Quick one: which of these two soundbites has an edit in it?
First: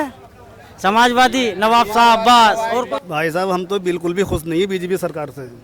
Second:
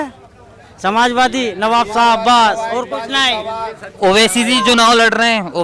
first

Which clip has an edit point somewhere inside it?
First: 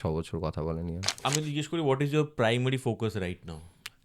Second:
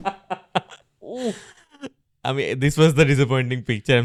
first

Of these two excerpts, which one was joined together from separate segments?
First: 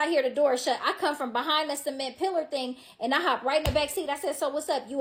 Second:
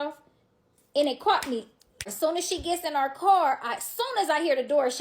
second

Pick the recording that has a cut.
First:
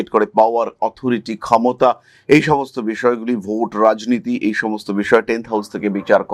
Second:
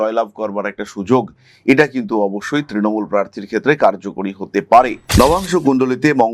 second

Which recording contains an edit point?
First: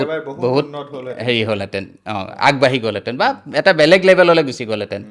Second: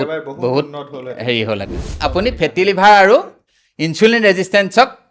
second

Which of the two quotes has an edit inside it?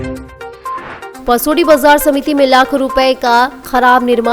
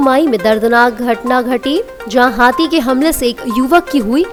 first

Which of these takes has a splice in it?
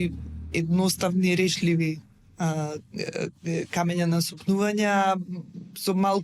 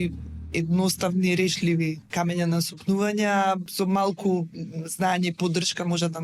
second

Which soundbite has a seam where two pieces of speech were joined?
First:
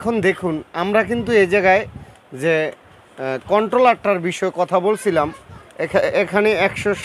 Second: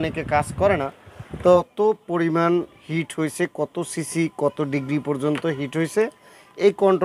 second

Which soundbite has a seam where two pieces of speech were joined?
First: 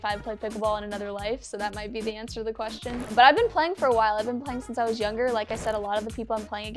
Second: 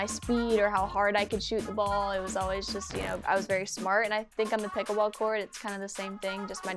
first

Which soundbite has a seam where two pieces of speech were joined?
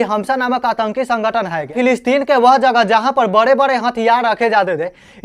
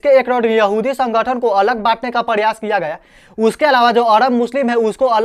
first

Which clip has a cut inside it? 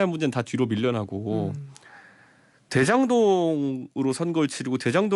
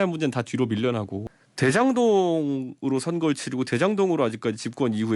second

